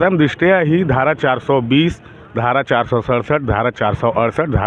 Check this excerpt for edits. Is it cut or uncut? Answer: uncut